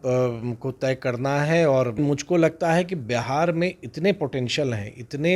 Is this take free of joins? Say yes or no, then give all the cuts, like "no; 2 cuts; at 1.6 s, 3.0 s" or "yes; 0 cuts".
no; 1 cut; at 2.0 s